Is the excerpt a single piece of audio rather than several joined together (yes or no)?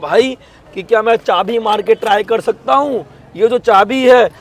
yes